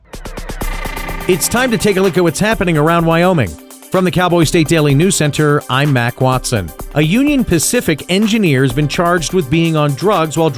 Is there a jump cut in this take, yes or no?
yes